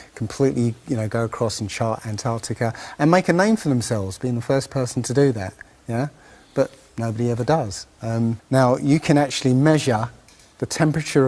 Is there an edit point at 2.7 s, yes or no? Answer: no